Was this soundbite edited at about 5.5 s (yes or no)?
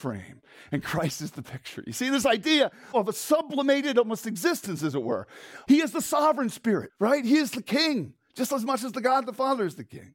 yes